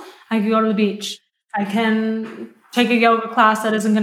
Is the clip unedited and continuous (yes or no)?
no